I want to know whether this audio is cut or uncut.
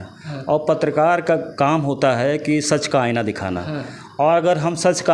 uncut